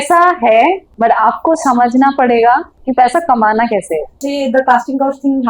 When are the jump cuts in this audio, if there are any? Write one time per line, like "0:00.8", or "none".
0:00.9
0:02.8
0:04.2